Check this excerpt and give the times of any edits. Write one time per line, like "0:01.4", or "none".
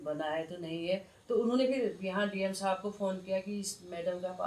none